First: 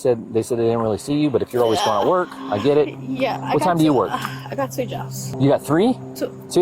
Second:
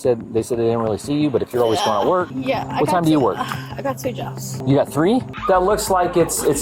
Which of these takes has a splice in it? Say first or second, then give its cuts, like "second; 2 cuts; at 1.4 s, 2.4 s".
second; 2 cuts; at 2.3 s, 5.3 s